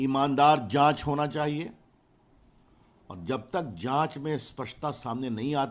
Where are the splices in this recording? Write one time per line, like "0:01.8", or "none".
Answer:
none